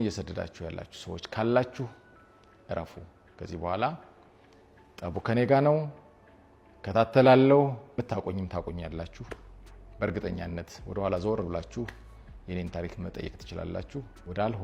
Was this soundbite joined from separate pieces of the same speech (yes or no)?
no